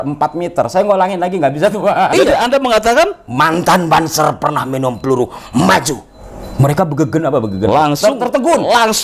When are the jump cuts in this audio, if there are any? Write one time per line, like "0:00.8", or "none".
0:02.1